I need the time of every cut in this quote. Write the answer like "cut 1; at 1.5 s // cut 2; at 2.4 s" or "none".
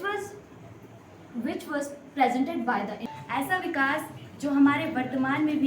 cut 1; at 3.0 s